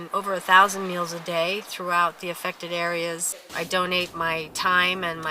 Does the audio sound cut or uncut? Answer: cut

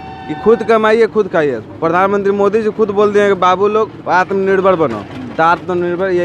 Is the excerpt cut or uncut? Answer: uncut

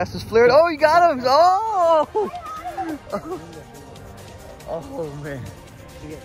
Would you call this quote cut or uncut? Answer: uncut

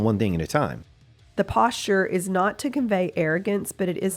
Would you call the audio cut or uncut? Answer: cut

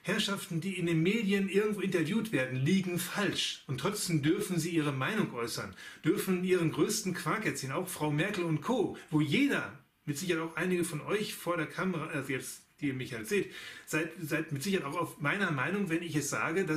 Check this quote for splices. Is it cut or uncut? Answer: cut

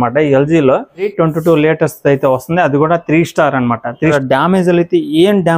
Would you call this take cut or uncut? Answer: cut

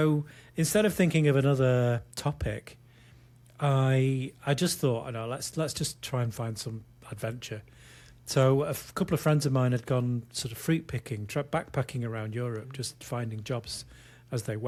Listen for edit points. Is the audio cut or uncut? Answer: uncut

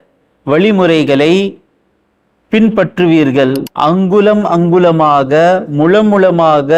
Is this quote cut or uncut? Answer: cut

